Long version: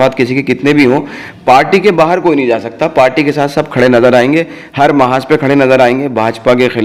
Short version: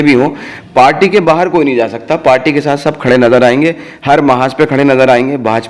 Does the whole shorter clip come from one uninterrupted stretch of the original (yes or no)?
yes